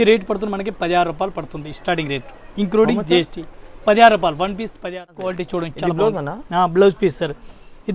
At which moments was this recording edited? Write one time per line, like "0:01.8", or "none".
0:05.4

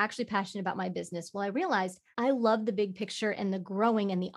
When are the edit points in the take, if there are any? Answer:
0:02.0

